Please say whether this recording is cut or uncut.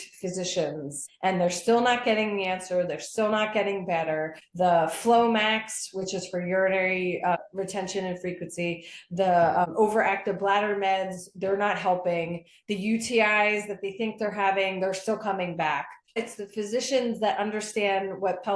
cut